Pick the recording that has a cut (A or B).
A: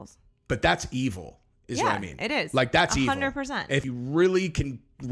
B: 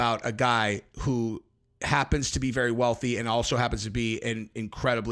A